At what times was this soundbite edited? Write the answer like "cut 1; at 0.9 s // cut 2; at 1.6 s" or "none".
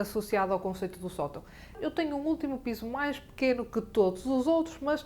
cut 1; at 1.7 s